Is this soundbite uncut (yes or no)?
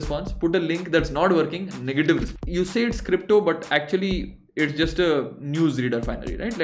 no